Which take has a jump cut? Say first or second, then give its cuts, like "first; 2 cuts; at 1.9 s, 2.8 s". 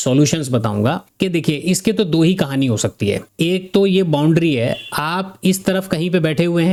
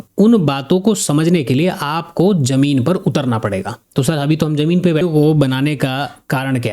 second; 1 cut; at 5.0 s